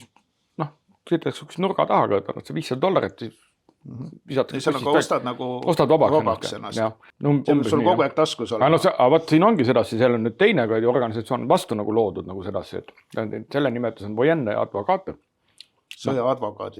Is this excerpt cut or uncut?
cut